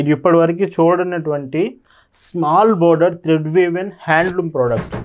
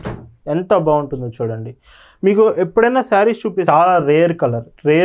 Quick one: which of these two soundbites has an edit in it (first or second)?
second